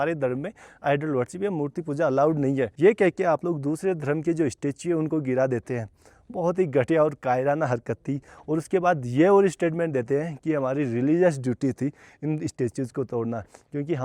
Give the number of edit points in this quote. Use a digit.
0